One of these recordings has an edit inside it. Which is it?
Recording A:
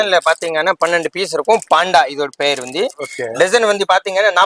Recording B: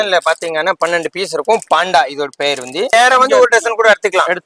B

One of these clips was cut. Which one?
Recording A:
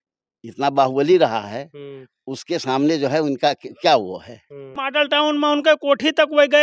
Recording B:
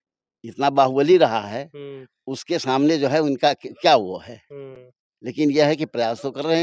A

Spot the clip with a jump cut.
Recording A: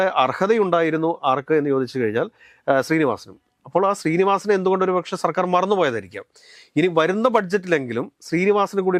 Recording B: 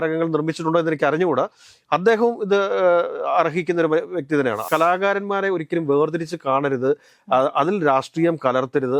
B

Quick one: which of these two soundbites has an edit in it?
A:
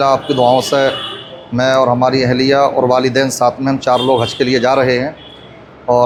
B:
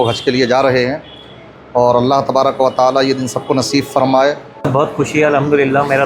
B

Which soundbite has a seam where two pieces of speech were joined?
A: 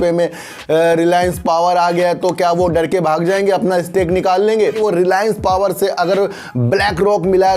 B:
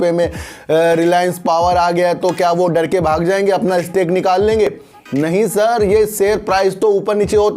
A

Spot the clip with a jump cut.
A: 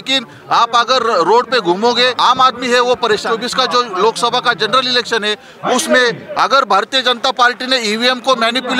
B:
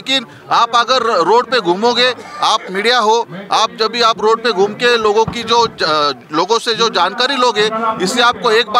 A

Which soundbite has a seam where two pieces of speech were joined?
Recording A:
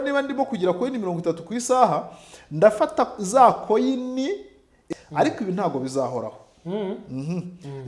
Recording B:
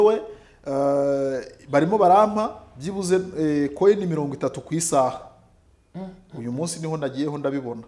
A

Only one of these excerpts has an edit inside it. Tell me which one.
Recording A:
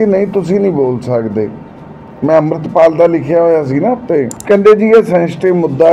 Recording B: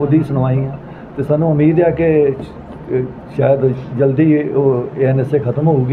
A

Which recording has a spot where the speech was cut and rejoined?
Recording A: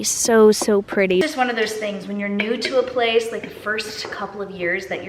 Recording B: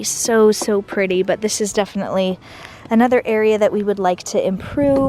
A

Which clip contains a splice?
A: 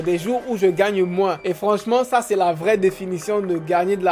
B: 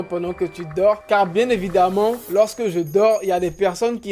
A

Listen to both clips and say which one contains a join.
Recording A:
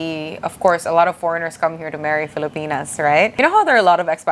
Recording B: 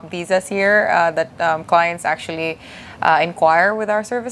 A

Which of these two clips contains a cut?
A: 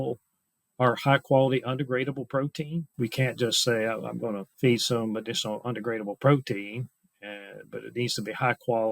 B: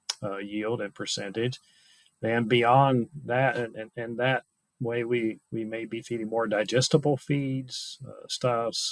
A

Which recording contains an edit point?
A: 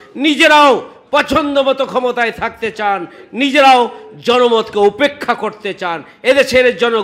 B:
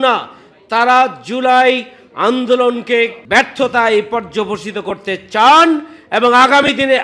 B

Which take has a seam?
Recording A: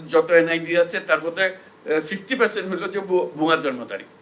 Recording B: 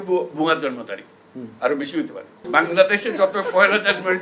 B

